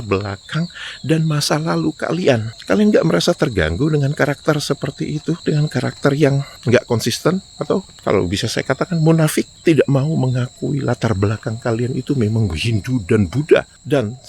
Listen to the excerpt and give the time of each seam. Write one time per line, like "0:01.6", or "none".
none

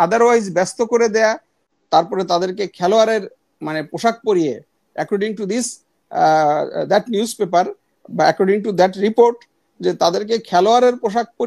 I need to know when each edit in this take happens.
0:01.7

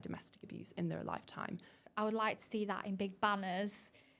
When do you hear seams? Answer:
0:01.8

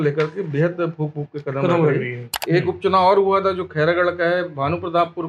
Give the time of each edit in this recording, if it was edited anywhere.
0:02.3

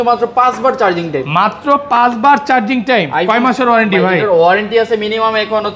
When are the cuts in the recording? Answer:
none

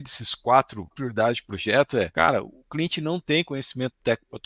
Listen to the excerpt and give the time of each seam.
0:01.0
0:02.1

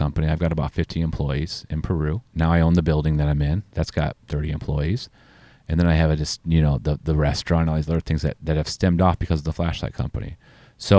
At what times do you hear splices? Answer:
0:02.3
0:04.2

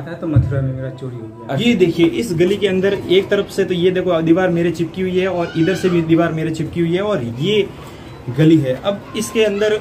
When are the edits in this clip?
0:01.6

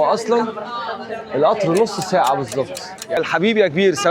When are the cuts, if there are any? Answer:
0:03.2

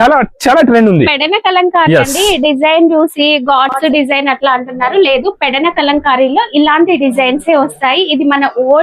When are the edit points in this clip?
none

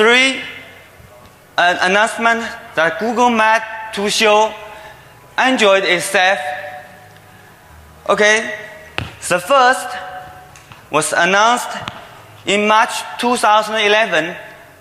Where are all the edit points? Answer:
0:13.6

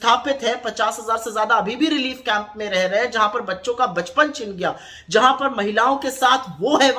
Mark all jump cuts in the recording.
none

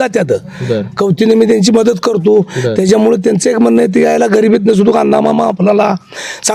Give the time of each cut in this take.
none

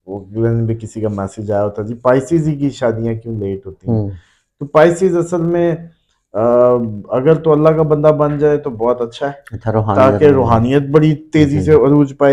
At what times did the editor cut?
none

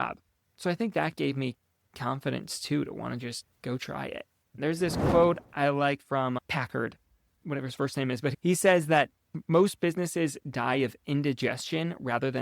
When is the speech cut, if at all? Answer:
0:04.4
0:09.4

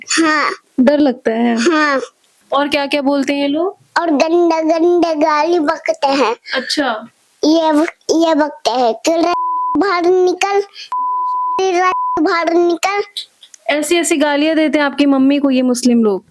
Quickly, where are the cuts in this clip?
0:02.3

